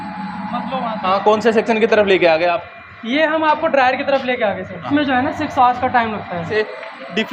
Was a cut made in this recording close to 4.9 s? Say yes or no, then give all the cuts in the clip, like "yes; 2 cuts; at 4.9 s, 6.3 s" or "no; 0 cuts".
yes; 3 cuts; at 1.0 s, 4.9 s, 6.5 s